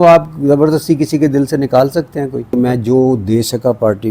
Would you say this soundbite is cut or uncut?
cut